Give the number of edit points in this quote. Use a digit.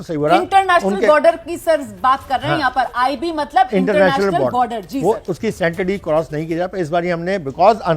1